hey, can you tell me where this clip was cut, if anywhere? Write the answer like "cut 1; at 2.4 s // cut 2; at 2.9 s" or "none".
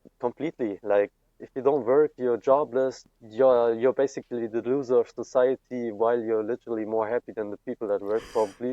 cut 1; at 1.4 s // cut 2; at 3.0 s